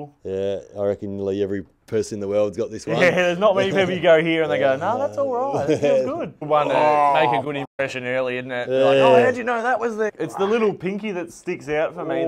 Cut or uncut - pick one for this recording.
cut